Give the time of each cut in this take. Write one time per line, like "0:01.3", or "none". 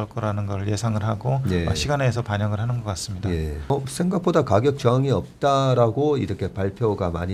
0:03.7